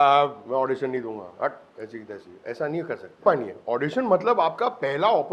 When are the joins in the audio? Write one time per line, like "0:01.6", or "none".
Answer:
0:03.2